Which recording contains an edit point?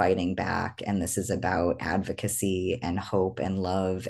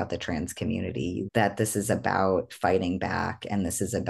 second; 1 cut; at 1.2 s

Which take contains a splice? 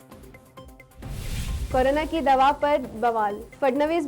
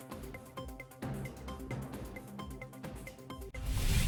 first; 1 cut; at 0.9 s

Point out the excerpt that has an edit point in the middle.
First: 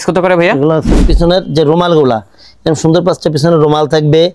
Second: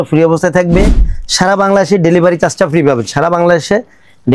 first; 1 cut; at 1.1 s

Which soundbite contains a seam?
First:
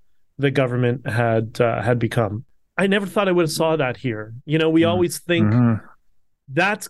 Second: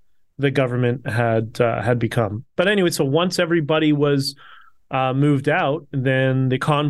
first; 1 cut; at 2.4 s

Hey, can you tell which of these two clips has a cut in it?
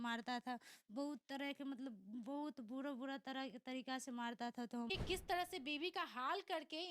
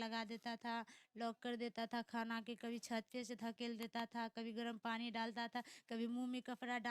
first; 1 cut; at 4.9 s

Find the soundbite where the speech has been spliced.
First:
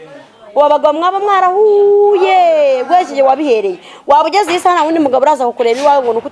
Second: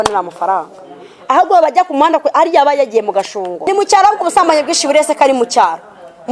second; 1 cut; at 3.7 s

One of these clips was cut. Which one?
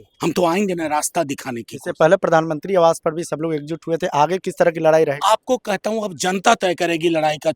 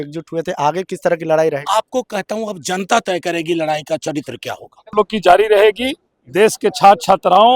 second; 1 cut; at 4.9 s

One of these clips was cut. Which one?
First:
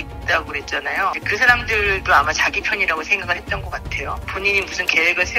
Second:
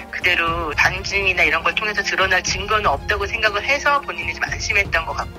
first; 1 cut; at 4.3 s

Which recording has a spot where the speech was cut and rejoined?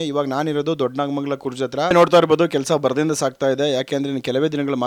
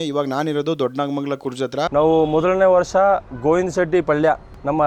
second; 1 cut; at 1.8 s

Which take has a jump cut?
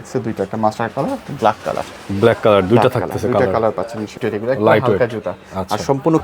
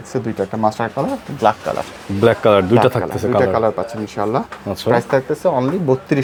first; 1 cut; at 4.2 s

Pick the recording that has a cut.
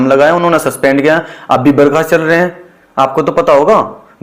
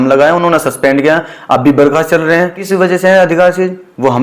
second; 1 cut; at 2.6 s

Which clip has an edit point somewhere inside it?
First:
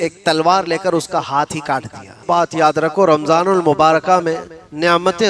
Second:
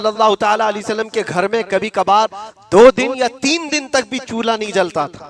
first; 1 cut; at 2.2 s

